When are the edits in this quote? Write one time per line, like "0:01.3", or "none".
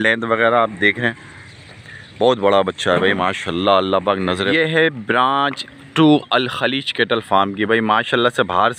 0:03.8